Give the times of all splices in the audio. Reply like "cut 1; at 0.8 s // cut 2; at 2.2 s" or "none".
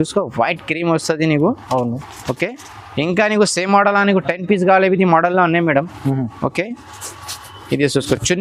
none